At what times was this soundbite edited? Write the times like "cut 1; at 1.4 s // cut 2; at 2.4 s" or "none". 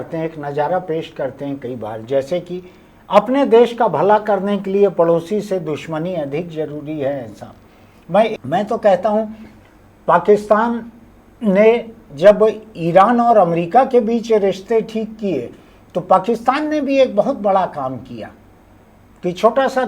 cut 1; at 8.3 s